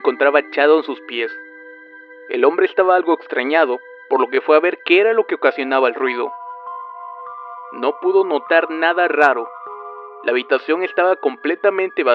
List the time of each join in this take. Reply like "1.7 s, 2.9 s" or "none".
9.0 s